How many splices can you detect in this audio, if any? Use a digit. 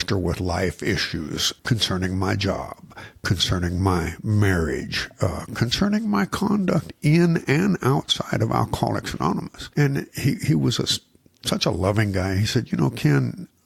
2